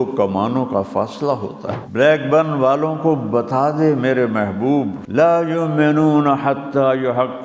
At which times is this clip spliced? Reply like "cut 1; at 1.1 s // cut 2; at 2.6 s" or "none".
cut 1; at 1.7 s // cut 2; at 5.0 s